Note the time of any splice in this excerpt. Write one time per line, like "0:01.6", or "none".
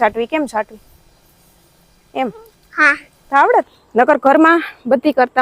0:03.8